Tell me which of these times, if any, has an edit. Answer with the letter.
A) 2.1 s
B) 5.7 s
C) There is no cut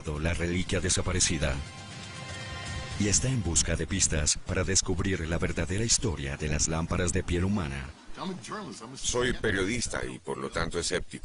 A